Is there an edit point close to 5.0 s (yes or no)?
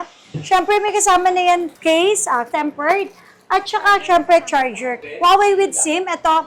yes